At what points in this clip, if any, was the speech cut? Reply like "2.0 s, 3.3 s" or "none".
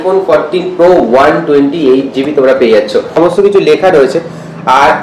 3.3 s